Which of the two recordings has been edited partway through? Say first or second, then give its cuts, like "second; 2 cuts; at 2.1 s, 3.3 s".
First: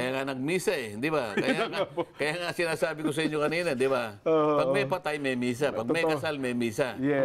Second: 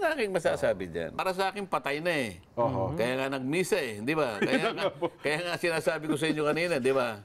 second; 1 cut; at 1.2 s